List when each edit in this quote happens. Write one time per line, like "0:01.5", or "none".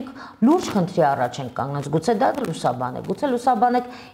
none